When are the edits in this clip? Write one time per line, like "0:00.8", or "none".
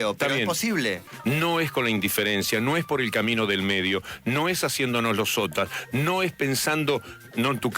0:01.0